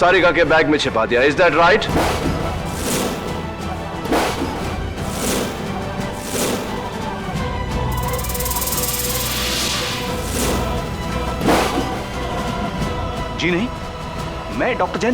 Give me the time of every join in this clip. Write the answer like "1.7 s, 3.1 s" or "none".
11.0 s